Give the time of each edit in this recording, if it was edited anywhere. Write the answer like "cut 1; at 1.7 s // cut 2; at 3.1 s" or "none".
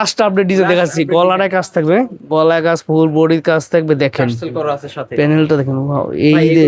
none